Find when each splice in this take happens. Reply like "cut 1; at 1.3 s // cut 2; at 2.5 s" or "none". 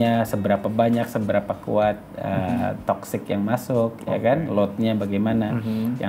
none